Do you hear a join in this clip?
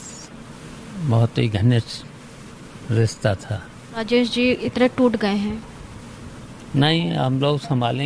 yes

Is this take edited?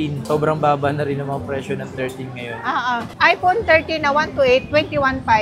no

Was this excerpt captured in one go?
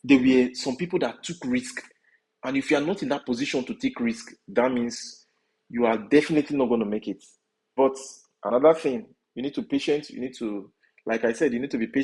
no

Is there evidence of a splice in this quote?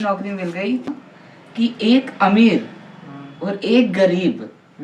yes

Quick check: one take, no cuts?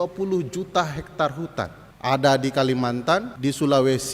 no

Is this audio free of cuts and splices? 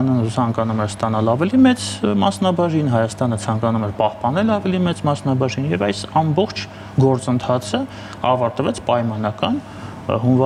yes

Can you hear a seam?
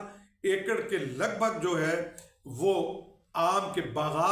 no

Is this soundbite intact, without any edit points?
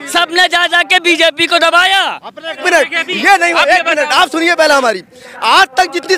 no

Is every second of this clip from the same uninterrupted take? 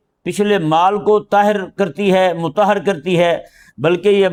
yes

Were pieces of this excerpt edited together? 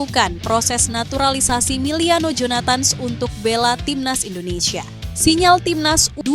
yes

